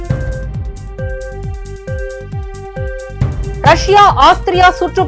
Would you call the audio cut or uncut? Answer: cut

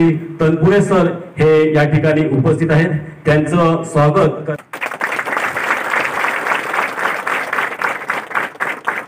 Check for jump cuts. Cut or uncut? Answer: cut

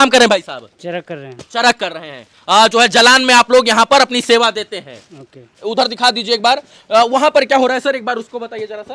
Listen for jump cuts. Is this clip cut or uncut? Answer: uncut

